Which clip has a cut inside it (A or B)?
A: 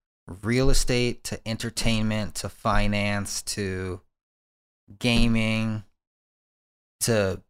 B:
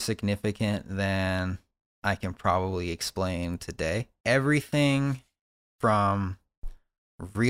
B